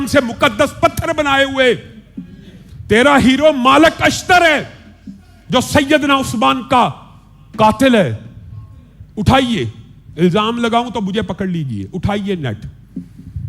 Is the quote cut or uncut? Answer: uncut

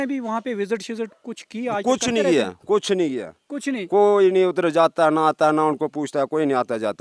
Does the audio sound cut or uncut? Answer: uncut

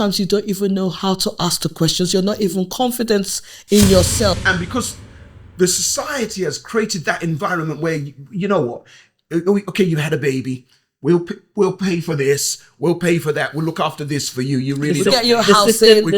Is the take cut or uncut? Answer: cut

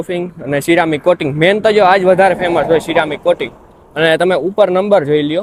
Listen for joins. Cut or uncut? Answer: uncut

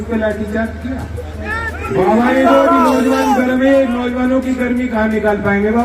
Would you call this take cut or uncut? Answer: cut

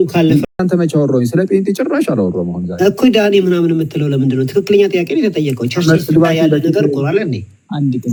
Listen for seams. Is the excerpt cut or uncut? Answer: uncut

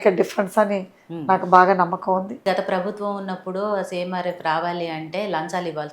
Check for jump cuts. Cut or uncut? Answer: cut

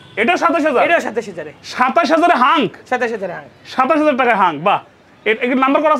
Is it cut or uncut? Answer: uncut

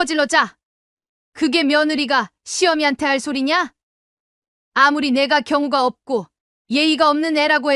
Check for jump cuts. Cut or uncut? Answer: uncut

